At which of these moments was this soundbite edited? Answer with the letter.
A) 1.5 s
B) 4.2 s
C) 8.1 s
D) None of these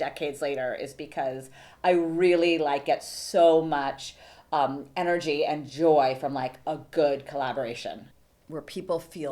C